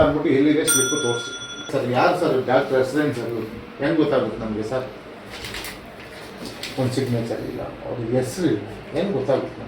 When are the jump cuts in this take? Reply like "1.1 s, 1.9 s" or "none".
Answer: 1.7 s